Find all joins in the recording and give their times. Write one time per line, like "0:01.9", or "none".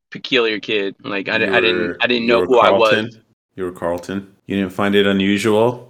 0:04.3

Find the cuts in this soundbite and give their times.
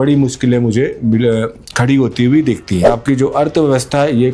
0:02.9

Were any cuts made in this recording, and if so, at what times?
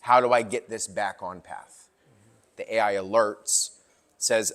0:02.3

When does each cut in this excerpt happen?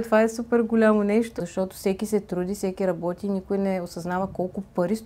0:01.3

